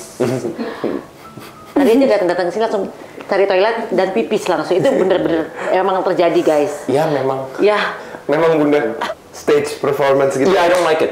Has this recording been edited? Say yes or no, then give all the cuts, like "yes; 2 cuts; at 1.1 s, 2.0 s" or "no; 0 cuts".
yes; 1 cut; at 9.0 s